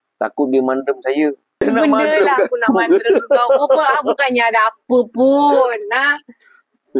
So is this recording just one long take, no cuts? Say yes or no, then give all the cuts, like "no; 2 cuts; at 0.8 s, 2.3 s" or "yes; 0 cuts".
no; 1 cut; at 1.6 s